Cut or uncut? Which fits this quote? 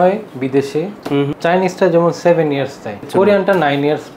cut